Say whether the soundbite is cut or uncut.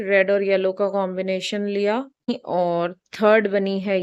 cut